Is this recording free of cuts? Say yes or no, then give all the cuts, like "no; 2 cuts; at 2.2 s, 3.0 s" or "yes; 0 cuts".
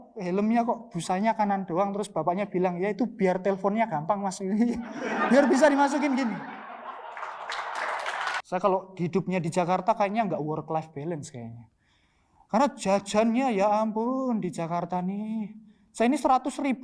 no; 1 cut; at 8.3 s